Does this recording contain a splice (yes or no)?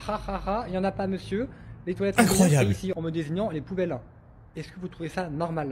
yes